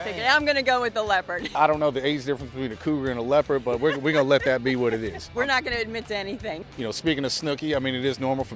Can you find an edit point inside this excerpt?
yes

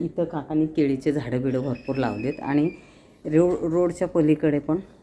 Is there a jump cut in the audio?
no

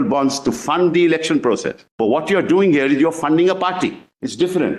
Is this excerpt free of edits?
yes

